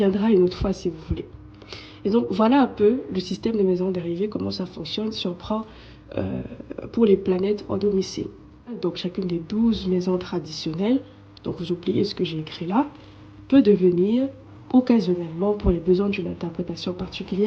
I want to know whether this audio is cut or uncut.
uncut